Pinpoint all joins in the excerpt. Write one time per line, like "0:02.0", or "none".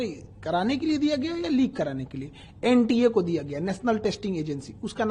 none